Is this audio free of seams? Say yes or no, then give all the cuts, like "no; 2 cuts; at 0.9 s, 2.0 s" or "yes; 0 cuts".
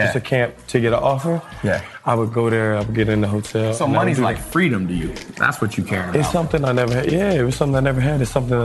yes; 0 cuts